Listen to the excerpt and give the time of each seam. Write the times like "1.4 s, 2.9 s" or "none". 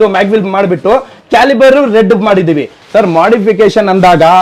2.7 s